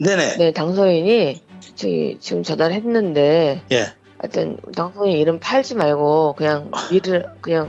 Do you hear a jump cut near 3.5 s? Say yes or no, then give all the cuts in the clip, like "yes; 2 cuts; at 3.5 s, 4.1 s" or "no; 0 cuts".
no; 0 cuts